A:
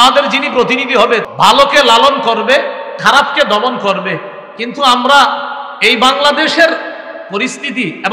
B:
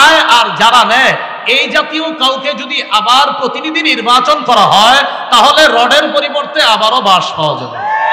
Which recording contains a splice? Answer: A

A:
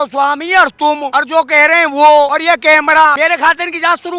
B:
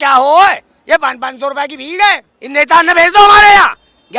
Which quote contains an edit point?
A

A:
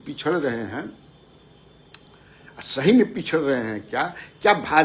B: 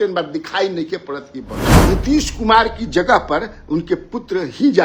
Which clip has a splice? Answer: B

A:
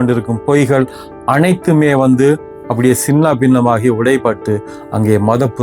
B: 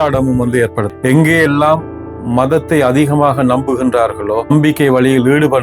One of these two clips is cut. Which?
B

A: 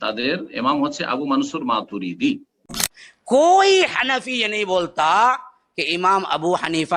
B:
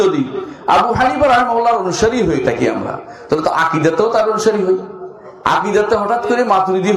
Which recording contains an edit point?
A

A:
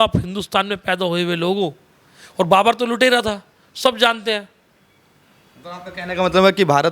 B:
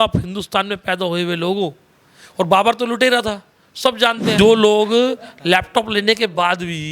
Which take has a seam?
B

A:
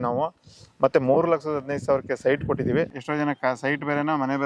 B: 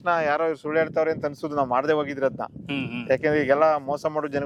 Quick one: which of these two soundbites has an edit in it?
A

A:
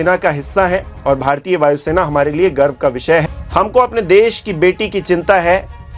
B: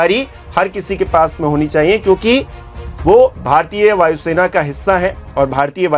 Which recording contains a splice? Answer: A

